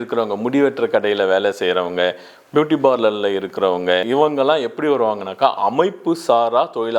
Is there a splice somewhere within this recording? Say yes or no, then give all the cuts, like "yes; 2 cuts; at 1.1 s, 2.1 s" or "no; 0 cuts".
yes; 1 cut; at 4.0 s